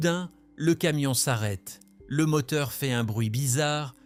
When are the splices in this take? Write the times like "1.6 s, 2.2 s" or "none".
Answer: none